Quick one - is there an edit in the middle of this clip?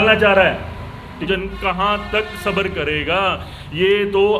yes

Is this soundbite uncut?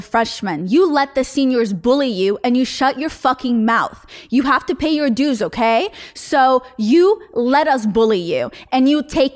yes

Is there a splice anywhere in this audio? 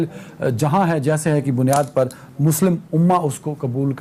no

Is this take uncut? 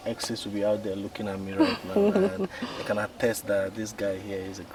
yes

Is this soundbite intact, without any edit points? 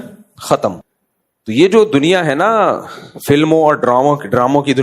no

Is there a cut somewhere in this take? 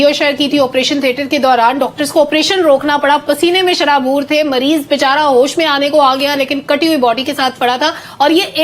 no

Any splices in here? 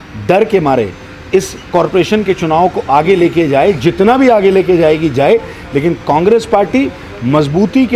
no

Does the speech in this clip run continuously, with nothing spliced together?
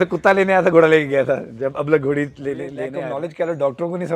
no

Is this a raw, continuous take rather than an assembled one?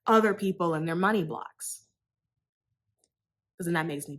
yes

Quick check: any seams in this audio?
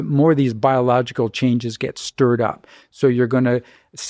no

